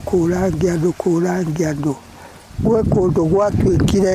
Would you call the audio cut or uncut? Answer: uncut